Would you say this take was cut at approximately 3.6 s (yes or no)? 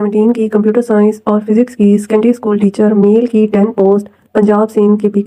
no